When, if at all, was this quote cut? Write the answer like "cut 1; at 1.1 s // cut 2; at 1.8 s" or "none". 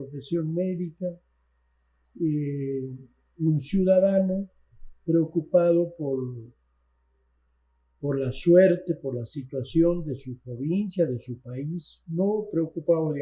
none